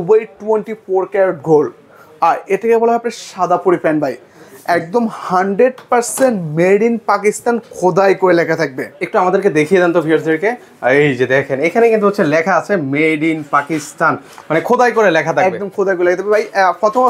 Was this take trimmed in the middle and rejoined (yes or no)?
no